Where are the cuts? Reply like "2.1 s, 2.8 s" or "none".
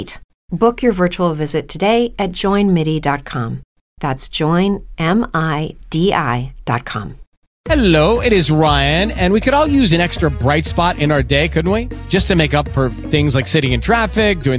7.5 s

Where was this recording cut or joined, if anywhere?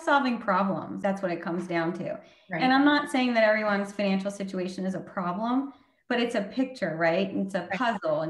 0.9 s

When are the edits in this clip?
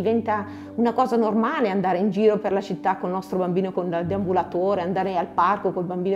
none

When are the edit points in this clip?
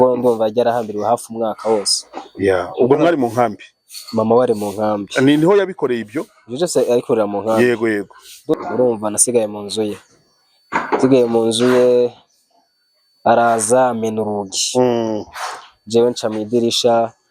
8.5 s

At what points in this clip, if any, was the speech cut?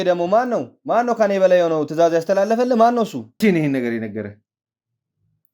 3.4 s

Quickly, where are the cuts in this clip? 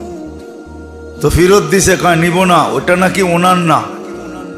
1.2 s

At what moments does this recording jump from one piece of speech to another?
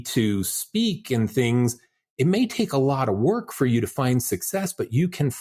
none

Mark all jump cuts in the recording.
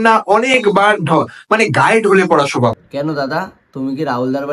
2.9 s

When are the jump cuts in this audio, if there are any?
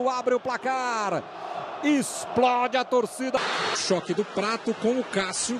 3.4 s

